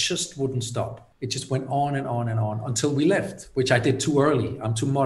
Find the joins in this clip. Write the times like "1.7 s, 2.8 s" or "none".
1.0 s

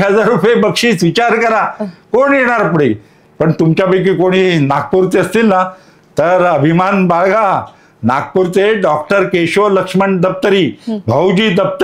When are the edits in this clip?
none

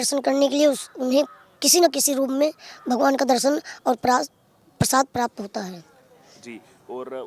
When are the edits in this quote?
none

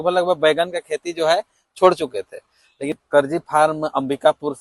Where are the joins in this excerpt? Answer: 3.0 s

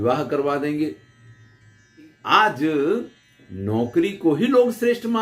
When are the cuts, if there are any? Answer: 2.1 s

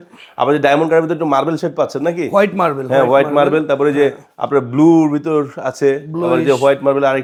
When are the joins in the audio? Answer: none

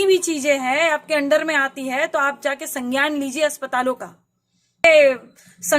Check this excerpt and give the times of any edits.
4.8 s

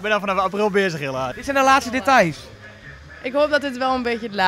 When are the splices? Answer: 1.4 s

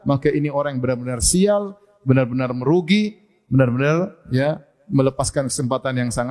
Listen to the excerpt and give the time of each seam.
none

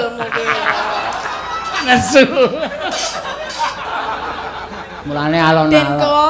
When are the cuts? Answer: 3.9 s

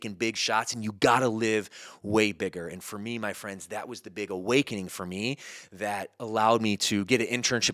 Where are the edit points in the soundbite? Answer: none

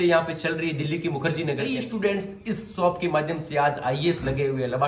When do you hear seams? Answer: 1.8 s

